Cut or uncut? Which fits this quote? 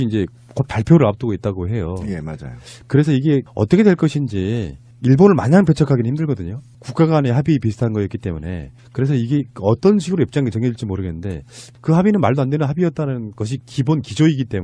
cut